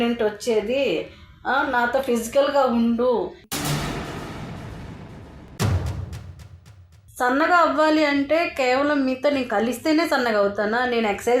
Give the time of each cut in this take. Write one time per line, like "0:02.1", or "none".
0:07.0